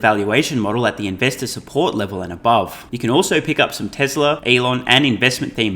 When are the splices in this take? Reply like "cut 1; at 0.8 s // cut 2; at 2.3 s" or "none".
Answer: cut 1; at 2.9 s // cut 2; at 4.4 s